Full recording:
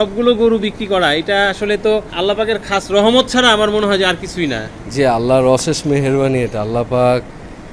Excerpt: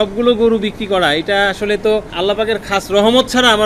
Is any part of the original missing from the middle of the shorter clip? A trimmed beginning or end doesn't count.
no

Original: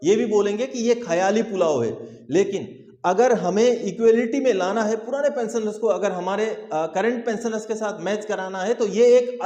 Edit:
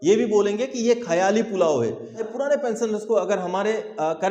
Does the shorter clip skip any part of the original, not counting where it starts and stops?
yes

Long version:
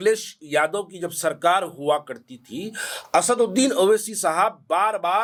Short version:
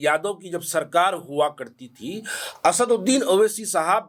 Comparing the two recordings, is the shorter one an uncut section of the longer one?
yes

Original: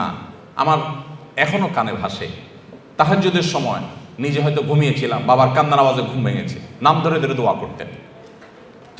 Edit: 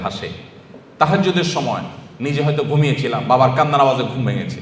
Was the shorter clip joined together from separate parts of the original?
no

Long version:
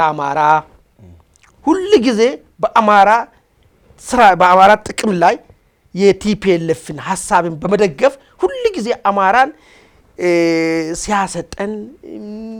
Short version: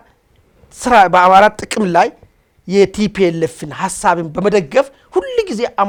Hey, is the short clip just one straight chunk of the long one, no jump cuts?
yes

